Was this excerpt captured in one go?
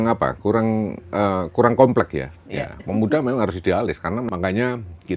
no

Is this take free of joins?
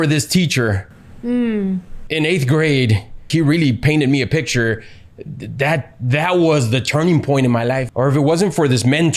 no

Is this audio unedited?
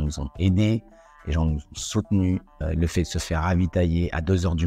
no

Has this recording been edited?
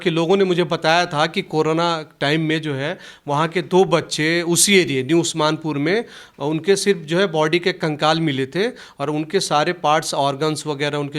no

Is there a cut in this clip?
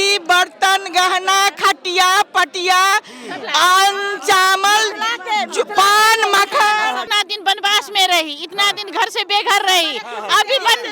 yes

